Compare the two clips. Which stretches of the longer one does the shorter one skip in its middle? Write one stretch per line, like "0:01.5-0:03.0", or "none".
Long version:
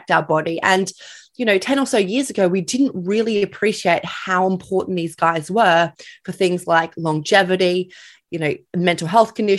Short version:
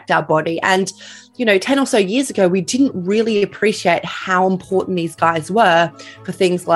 none